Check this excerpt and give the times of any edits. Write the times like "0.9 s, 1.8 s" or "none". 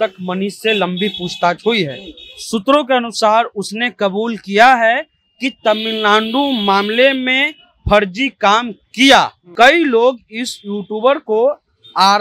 9.4 s